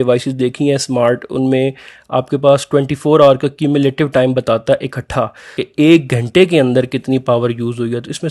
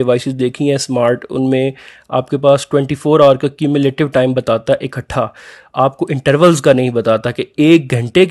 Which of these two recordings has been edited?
first; 1 cut; at 5.6 s

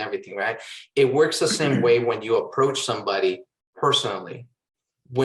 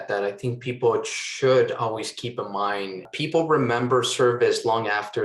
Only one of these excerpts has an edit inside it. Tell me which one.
second; 1 cut; at 3.1 s

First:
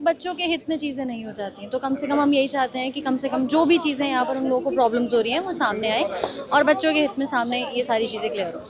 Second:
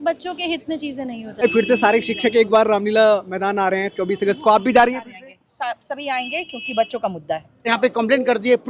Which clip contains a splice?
second; 2 cuts; at 1.4 s, 7.7 s

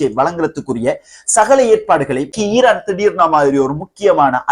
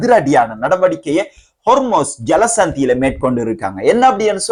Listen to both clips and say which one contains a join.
first; 1 cut; at 2.3 s

